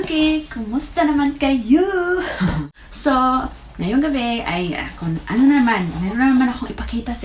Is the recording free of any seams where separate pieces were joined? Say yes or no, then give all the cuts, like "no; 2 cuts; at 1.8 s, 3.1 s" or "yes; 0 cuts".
no; 1 cut; at 2.6 s